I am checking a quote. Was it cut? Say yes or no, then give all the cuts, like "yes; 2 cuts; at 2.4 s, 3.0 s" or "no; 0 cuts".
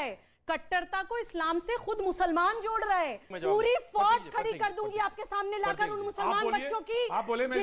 yes; 1 cut; at 3.2 s